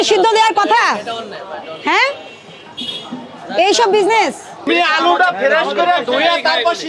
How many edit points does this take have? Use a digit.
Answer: 1